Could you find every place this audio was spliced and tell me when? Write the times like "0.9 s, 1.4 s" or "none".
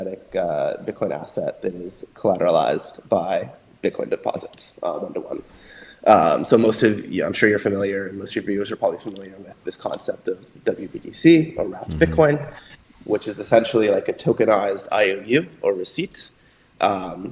none